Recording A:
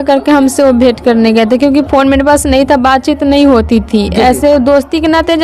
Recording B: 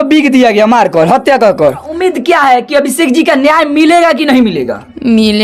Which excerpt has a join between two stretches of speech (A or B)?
B